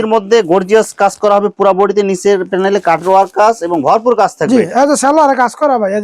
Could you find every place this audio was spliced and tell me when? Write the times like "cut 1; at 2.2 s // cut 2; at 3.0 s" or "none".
none